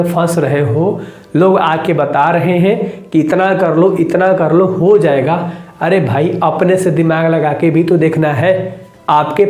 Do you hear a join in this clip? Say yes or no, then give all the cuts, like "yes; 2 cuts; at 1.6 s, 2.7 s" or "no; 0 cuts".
no; 0 cuts